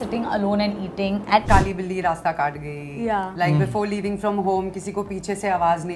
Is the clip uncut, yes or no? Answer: no